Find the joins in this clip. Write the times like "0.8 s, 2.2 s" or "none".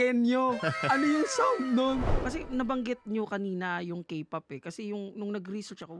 2.1 s